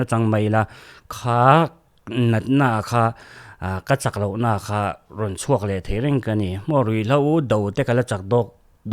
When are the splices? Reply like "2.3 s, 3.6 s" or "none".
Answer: none